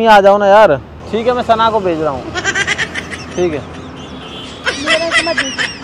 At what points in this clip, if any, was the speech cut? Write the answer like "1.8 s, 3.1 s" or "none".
1.0 s